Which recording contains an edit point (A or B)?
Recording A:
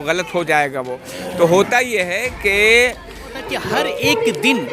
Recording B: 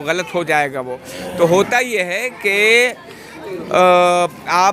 A